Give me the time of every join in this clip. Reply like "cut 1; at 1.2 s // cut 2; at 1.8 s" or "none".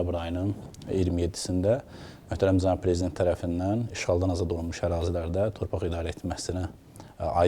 none